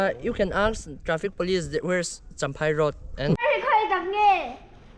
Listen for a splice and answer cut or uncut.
cut